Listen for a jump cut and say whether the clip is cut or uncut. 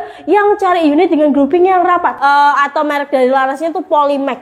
cut